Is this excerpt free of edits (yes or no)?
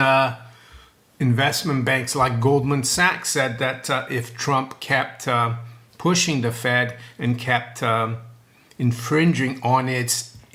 yes